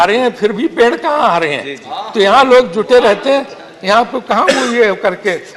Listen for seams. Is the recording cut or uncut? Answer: uncut